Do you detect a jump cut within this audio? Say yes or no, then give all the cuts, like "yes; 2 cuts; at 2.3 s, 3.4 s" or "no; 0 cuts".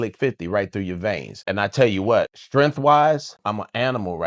yes; 3 cuts; at 1.4 s, 2.4 s, 3.4 s